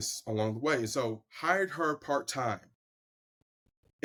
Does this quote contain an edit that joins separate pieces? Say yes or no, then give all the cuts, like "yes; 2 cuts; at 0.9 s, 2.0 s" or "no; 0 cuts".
no; 0 cuts